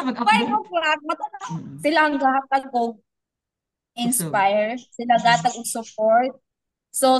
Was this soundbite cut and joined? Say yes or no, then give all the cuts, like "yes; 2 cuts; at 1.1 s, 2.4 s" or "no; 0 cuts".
yes; 1 cut; at 1.3 s